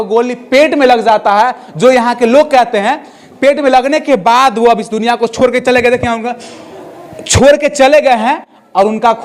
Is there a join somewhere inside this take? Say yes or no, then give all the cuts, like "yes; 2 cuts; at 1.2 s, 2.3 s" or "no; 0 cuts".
no; 0 cuts